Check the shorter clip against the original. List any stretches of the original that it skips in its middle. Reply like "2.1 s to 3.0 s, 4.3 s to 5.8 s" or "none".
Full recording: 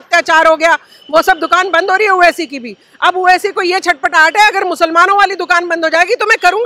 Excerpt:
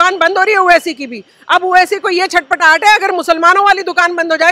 none